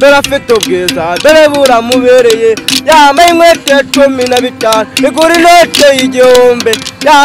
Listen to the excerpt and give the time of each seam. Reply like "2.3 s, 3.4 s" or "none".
none